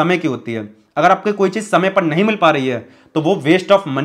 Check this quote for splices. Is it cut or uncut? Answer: uncut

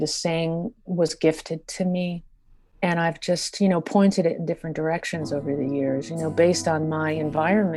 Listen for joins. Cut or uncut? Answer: uncut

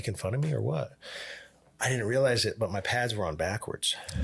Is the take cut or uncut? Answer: uncut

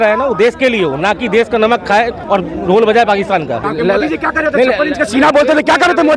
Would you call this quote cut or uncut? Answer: cut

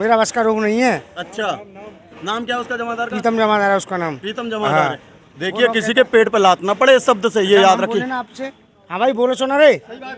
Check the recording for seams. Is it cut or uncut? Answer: uncut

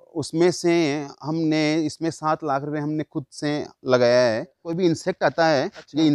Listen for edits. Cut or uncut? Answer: cut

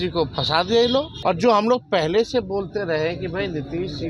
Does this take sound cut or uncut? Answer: cut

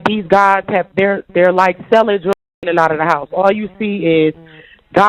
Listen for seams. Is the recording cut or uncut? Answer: uncut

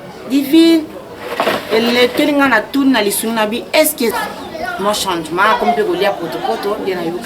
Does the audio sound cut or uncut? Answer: cut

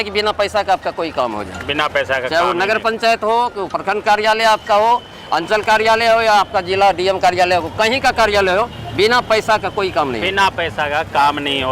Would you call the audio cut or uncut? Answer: uncut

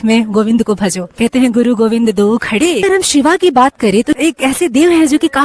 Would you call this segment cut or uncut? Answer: cut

